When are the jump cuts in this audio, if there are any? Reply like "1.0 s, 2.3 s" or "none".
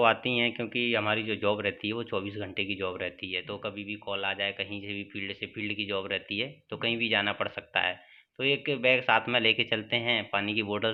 none